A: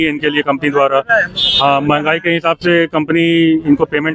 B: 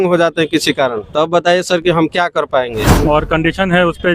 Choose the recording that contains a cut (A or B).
B